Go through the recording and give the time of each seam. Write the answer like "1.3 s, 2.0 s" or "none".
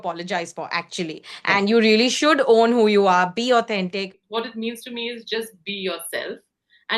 4.2 s